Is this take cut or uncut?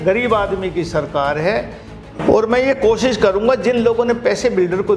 cut